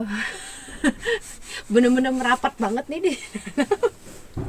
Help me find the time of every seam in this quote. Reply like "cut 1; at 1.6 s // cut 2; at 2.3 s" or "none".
none

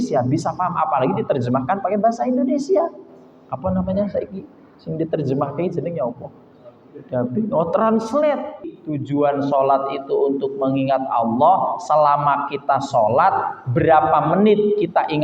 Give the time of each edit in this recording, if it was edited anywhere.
cut 1; at 8.7 s

